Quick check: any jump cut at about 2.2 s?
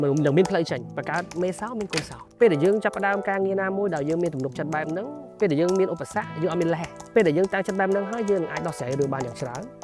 yes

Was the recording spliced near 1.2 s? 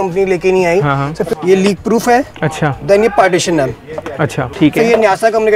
yes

